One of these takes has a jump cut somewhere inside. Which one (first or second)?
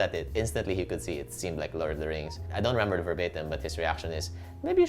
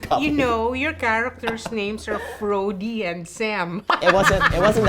first